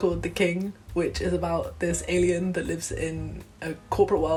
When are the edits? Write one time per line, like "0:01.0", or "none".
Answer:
none